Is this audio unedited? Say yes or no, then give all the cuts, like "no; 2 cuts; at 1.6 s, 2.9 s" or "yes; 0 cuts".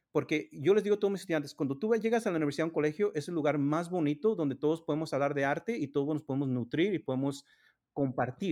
yes; 0 cuts